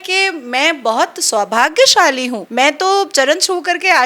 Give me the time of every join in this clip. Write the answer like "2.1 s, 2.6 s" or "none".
2.4 s